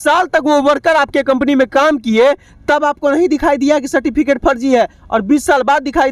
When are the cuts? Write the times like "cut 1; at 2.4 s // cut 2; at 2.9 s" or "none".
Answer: none